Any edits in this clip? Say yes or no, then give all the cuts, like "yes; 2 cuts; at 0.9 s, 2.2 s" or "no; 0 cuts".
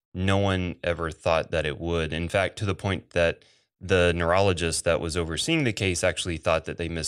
no; 0 cuts